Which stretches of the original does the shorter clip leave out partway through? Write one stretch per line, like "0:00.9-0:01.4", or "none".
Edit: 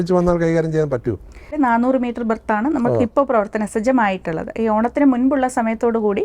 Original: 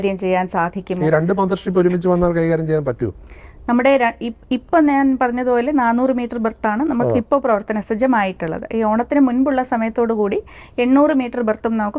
0:03.5-0:05.7